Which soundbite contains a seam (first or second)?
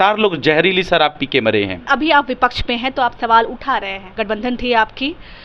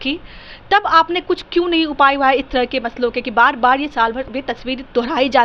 first